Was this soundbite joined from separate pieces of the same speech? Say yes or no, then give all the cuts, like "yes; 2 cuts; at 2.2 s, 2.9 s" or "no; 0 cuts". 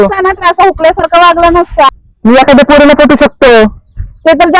yes; 1 cut; at 2.0 s